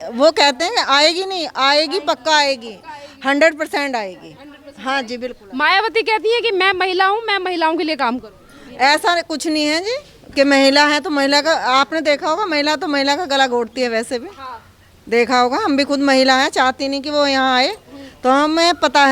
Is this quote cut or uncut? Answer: uncut